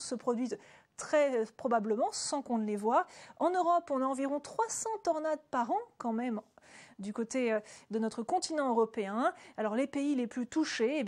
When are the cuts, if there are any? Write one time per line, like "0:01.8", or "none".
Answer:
0:03.6